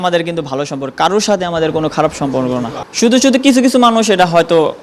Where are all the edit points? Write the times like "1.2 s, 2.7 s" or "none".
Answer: 2.8 s

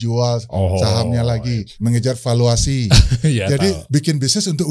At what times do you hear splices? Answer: 1.7 s, 3.8 s

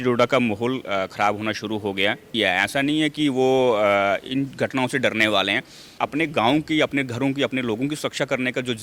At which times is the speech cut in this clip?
2.3 s, 5.9 s

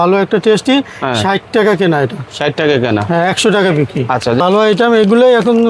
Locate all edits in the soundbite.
4.4 s

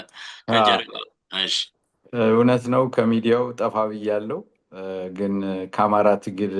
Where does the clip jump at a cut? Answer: none

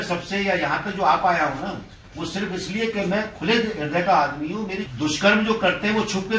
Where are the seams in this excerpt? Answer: 4.9 s

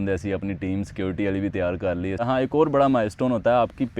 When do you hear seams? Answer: 2.2 s

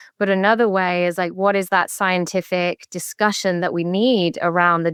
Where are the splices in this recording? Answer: none

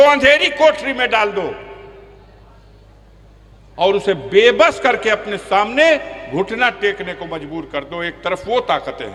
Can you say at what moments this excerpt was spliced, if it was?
none

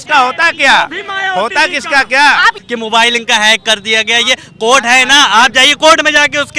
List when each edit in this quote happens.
2.6 s

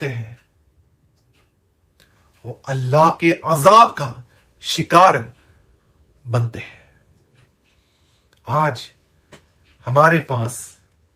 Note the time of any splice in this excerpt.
7.5 s

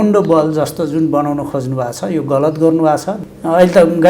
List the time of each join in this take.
3.1 s

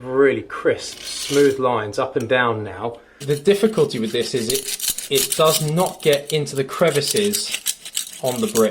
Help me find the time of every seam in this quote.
3.1 s

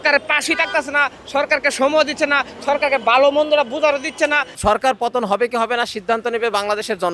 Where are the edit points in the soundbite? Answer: 4.5 s

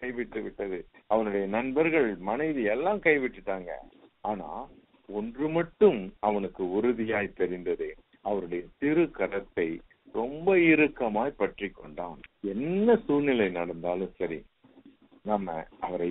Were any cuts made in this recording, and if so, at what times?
12.2 s

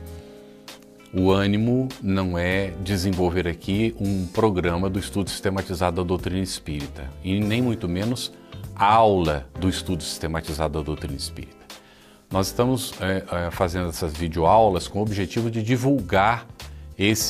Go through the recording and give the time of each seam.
12.5 s

